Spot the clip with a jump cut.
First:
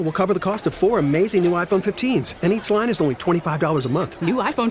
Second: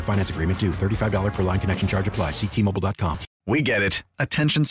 second; 1 cut; at 3.3 s

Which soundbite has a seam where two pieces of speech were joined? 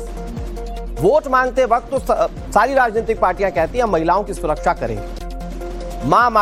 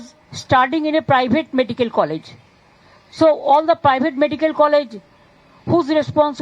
second; 1 cut; at 1.0 s

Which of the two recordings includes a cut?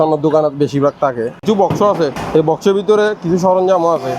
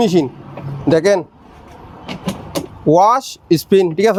first; 2 cuts; at 1.4 s, 2.2 s

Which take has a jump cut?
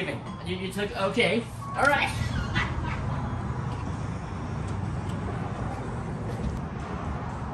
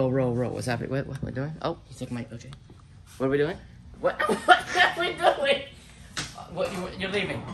first; 1 cut; at 6.6 s

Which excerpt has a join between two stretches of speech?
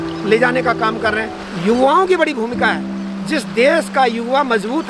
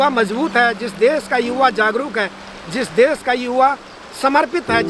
first; 1 cut; at 1.4 s

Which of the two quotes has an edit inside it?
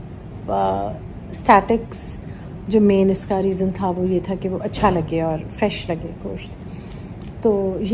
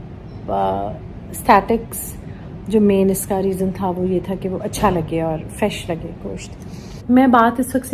second; 1 cut; at 7.0 s

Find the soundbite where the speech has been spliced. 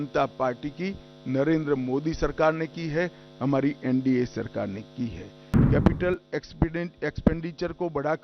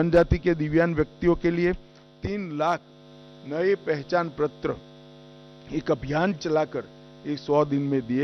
first; 1 cut; at 5.5 s

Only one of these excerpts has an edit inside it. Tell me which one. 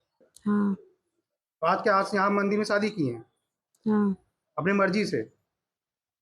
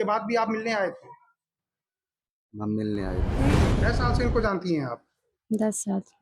second; 1 cut; at 3.7 s

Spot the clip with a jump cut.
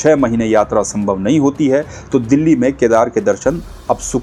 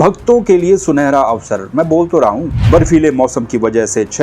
second; 1 cut; at 2.5 s

